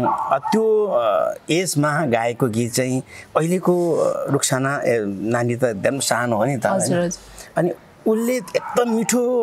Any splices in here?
no; 0 cuts

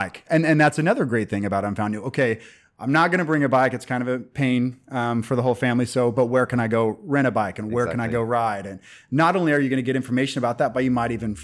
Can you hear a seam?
no; 0 cuts

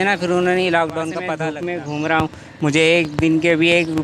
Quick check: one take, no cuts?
no; 1 cut; at 1.4 s

